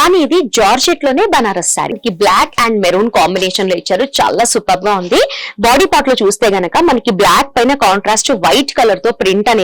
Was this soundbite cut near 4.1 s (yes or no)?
no